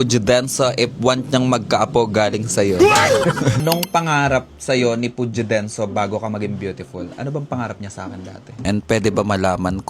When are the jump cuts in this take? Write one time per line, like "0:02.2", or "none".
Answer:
0:03.6
0:08.6